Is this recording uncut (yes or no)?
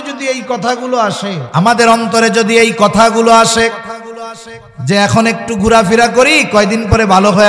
no